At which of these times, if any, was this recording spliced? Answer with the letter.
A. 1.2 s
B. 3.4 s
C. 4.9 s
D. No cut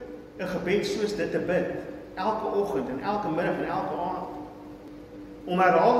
C